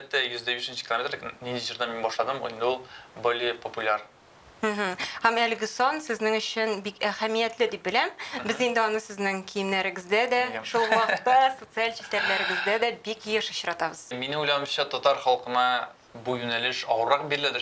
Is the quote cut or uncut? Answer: cut